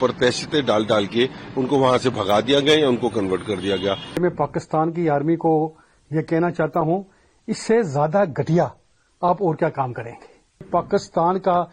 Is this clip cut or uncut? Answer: cut